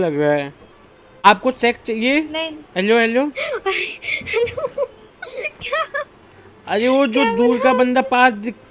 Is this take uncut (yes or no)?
no